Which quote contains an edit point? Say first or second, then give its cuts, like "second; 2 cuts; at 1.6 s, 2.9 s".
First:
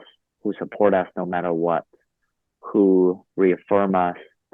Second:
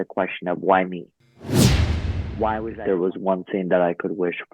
second; 1 cut; at 2.8 s